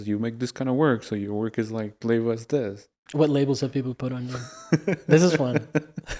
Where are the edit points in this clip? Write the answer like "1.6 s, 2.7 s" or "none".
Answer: 2.8 s